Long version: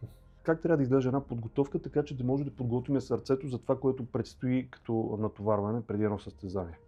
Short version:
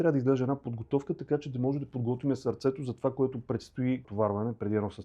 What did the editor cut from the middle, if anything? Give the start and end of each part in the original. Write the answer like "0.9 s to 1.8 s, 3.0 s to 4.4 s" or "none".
4.7 s to 5.4 s